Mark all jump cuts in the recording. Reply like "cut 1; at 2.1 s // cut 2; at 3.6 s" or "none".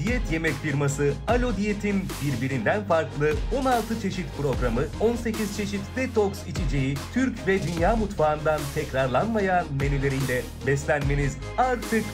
none